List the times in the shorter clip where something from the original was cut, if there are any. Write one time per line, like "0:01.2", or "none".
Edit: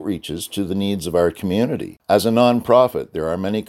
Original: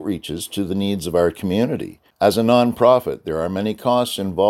0:01.9

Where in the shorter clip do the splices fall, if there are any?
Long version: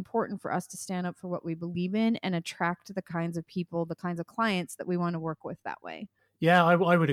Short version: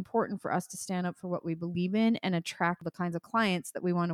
0:02.9

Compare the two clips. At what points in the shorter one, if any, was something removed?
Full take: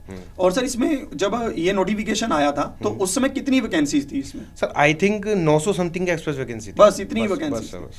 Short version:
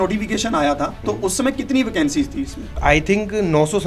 0:02.6

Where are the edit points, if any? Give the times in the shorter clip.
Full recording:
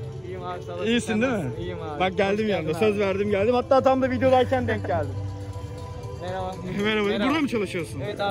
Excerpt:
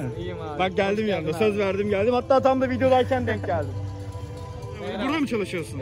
0:04.9

